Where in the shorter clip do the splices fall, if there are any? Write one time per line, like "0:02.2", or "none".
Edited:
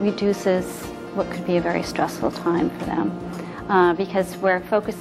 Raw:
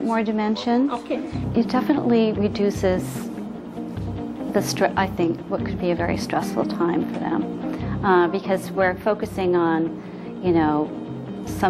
0:01.1